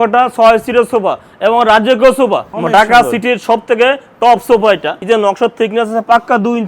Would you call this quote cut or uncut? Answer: cut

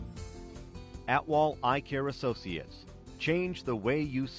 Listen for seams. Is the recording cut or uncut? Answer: cut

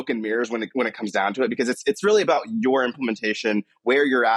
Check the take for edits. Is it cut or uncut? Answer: uncut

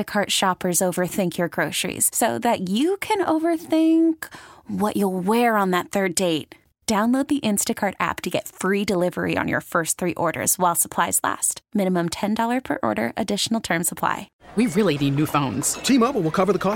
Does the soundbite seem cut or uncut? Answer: cut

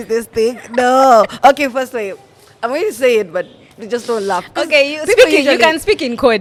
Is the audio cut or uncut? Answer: uncut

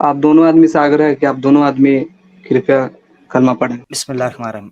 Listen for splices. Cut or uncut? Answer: cut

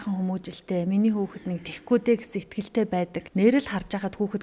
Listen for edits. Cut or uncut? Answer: cut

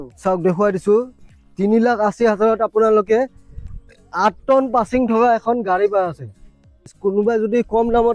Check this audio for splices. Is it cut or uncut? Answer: cut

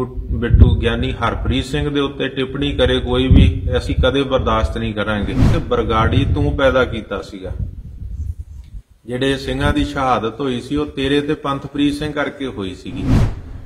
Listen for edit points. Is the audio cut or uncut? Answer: cut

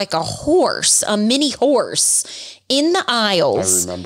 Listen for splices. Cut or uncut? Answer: uncut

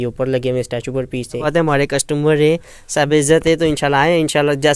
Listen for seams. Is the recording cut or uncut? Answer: cut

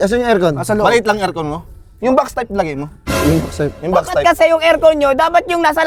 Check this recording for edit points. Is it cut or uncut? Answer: uncut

